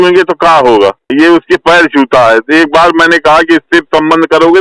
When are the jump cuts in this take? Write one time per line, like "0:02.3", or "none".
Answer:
0:01.1